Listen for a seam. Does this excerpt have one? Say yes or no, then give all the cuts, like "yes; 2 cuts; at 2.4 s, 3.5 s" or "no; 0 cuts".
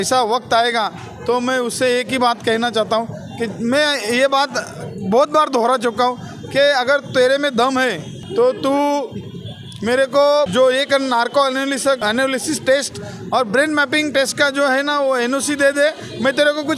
yes; 1 cut; at 12.0 s